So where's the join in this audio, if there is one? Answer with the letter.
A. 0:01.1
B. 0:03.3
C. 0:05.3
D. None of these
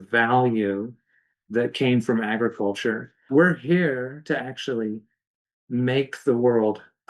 B